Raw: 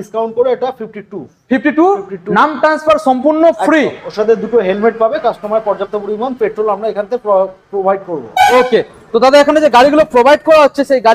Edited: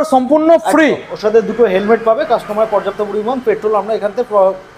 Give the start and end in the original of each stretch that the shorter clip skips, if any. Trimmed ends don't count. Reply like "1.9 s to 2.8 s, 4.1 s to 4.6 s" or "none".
none